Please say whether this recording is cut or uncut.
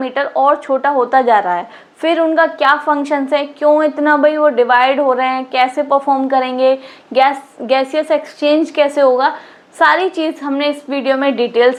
uncut